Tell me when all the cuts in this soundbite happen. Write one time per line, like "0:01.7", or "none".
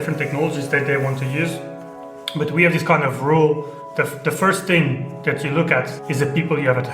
0:06.0